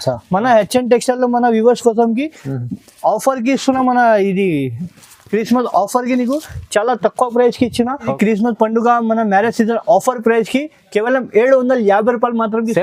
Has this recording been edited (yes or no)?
no